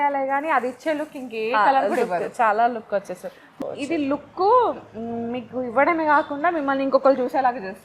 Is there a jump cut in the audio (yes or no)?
yes